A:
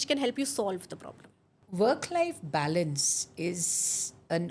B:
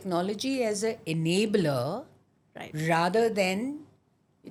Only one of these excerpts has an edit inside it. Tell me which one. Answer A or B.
A